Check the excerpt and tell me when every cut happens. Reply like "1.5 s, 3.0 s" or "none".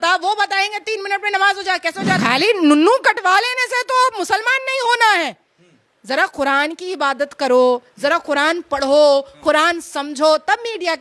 2.2 s